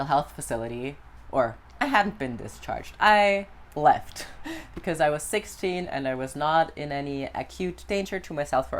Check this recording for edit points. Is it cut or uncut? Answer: uncut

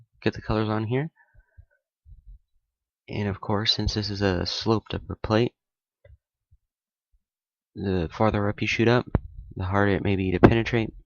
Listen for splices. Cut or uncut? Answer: uncut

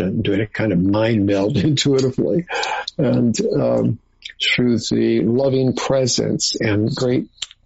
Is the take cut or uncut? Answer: uncut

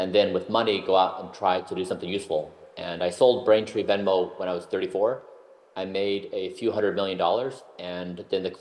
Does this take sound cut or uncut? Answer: uncut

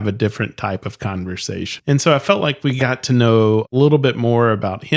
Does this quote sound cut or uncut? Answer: cut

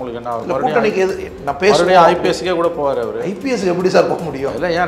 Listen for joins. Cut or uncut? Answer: uncut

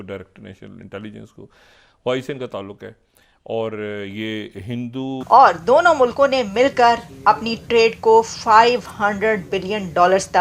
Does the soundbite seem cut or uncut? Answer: cut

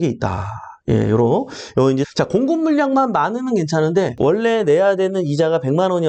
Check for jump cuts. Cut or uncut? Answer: cut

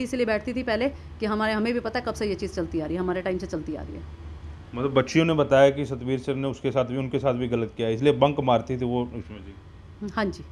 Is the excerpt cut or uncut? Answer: uncut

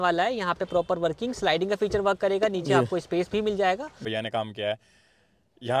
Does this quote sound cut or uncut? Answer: cut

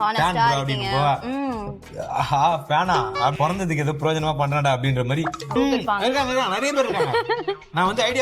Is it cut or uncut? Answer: cut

